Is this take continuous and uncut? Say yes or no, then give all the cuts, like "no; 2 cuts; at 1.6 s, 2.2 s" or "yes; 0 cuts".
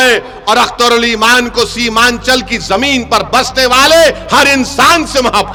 yes; 0 cuts